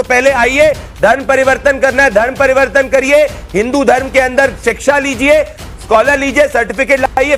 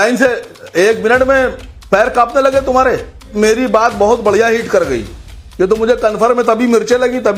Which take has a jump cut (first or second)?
second